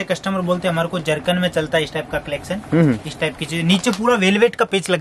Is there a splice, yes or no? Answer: no